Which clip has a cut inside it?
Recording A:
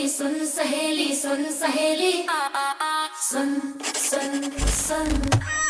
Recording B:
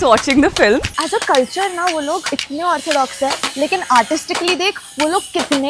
B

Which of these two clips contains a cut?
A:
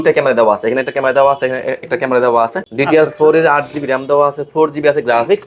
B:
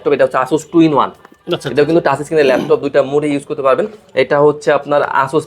A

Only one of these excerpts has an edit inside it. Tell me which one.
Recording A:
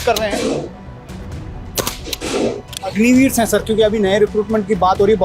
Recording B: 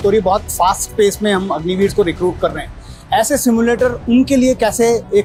A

